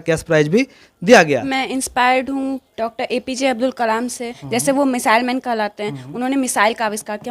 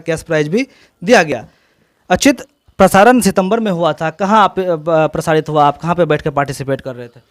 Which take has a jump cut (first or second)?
first